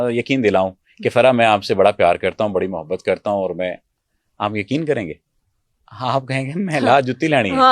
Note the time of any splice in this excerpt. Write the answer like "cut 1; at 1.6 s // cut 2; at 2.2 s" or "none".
none